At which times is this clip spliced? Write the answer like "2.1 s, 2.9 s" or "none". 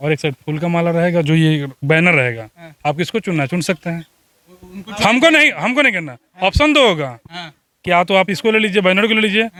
none